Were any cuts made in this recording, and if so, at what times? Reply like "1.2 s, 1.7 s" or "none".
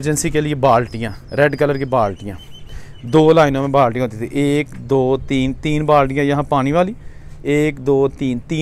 none